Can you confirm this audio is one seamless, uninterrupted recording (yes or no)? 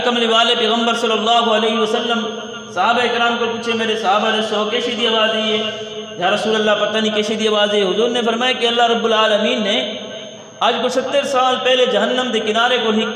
yes